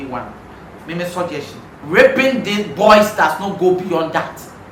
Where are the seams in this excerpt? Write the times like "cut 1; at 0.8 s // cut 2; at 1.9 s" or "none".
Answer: cut 1; at 1.7 s